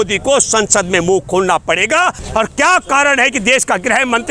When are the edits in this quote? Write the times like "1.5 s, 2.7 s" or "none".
2.2 s